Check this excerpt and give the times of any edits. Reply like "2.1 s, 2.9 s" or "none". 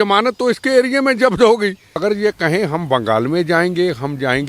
2.0 s